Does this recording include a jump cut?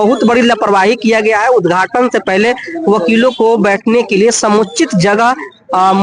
no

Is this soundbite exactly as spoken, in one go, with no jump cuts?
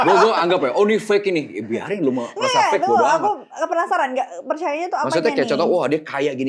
yes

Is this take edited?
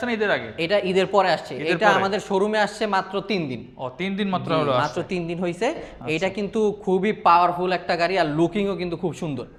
no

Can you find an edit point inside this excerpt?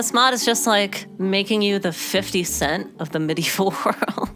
yes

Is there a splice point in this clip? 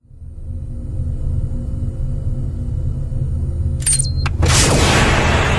yes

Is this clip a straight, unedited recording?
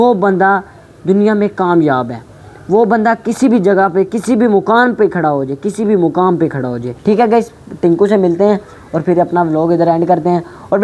no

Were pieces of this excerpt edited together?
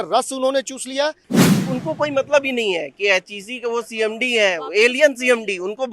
yes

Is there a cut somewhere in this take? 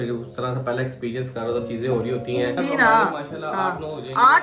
yes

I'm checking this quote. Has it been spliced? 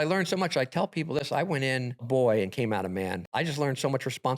yes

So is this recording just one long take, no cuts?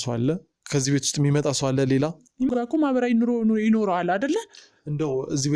no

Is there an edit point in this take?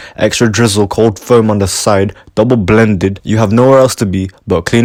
no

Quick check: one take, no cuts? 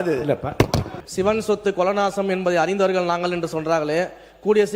no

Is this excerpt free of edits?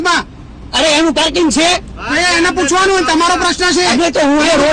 yes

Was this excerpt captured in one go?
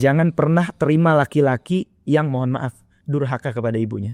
yes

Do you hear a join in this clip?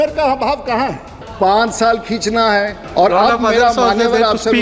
yes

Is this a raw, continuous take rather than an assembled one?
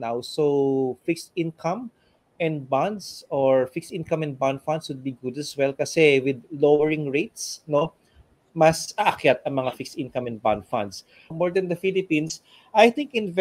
no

